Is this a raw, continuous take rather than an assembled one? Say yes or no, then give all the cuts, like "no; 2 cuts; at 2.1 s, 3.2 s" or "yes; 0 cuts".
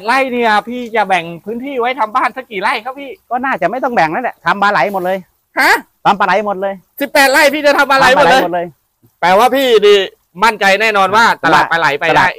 yes; 0 cuts